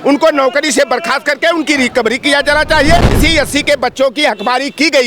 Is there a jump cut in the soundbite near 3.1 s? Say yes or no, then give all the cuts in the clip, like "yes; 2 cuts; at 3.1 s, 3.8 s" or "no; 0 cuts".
yes; 1 cut; at 3.1 s